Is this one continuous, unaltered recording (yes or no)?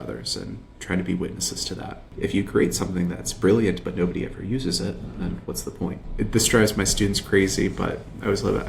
no